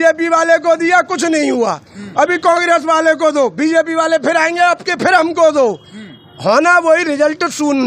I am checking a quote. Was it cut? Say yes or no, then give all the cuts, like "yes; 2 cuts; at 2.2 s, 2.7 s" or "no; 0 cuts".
no; 0 cuts